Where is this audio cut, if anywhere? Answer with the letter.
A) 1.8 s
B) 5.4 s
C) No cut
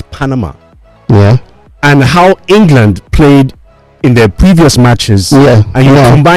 C